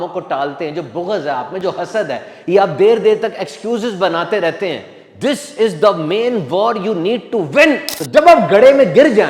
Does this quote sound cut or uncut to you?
cut